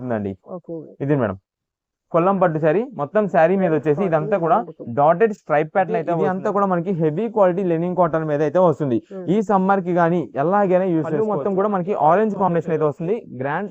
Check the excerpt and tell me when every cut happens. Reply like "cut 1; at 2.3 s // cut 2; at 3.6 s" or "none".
cut 1; at 6.1 s // cut 2; at 11.1 s